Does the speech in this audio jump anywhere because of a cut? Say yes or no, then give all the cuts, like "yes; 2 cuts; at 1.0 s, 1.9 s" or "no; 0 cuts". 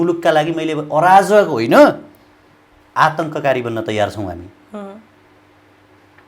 no; 0 cuts